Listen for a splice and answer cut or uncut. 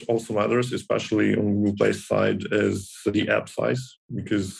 cut